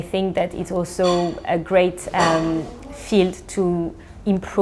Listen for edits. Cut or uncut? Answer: uncut